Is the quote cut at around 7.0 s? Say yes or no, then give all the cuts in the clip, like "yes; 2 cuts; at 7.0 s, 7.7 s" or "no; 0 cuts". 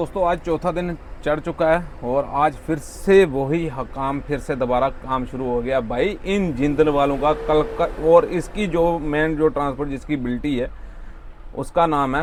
no; 0 cuts